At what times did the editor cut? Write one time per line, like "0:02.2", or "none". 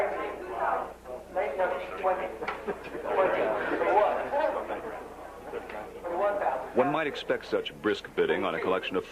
0:07.0